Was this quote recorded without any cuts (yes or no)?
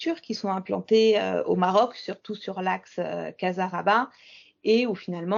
yes